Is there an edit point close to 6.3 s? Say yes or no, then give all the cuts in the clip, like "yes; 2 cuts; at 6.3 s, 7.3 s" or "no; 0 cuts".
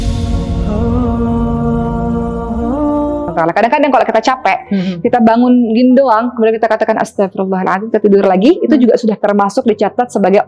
no; 1 cut; at 3.3 s